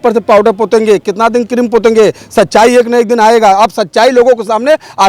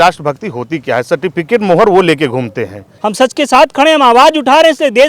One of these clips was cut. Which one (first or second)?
second